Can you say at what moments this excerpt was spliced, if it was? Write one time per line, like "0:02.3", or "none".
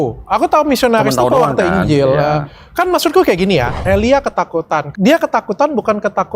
0:03.7
0:04.9

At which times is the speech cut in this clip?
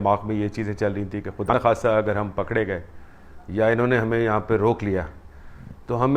0:01.5

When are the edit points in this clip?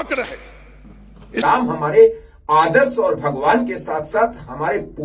0:01.4

